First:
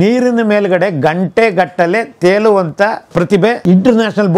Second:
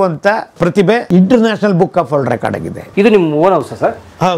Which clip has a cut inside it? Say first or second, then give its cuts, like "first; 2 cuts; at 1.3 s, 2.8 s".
second; 1 cut; at 2.8 s